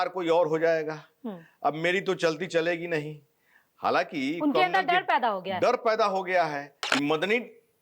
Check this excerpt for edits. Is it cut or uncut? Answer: cut